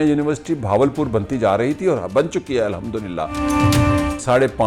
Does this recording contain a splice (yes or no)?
yes